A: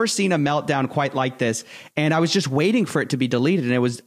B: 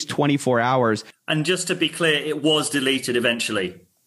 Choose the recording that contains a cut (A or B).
B